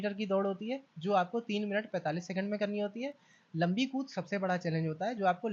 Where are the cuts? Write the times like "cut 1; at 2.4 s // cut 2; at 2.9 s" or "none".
none